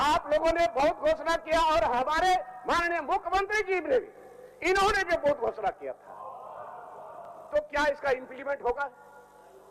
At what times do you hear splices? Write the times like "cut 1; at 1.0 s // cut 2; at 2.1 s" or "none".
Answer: none